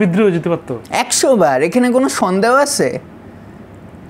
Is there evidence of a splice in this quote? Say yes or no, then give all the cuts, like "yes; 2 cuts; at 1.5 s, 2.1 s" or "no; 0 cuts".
no; 0 cuts